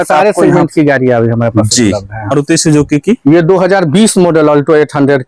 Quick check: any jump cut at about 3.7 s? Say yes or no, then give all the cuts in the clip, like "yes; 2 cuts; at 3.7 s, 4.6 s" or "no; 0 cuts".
no; 1 cut; at 2.3 s